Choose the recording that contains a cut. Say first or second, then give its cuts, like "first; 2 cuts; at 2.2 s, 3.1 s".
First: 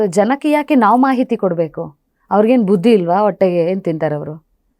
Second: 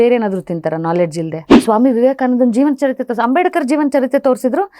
second; 1 cut; at 1.5 s